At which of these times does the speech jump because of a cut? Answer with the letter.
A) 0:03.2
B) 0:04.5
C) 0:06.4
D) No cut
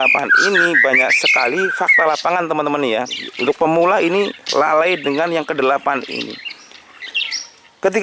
A